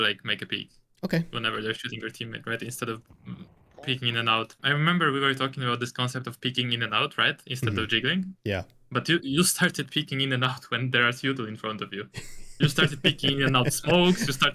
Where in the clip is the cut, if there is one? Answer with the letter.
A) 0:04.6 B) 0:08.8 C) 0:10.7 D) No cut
A